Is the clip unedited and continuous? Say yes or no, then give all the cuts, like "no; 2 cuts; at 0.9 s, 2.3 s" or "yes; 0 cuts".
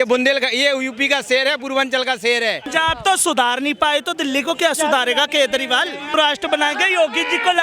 no; 2 cuts; at 2.7 s, 6.1 s